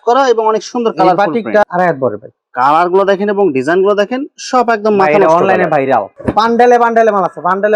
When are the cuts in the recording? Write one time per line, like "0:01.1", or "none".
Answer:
0:01.6
0:06.1